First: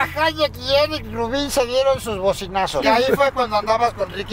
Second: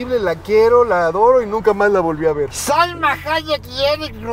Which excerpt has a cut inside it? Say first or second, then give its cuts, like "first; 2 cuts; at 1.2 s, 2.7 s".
first; 1 cut; at 2.8 s